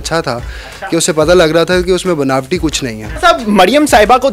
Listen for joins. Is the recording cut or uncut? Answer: cut